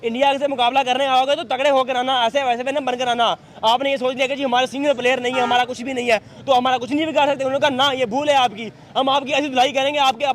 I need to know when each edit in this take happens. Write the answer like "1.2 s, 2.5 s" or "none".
none